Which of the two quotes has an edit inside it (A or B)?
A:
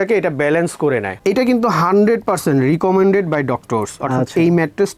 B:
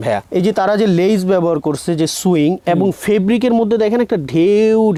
A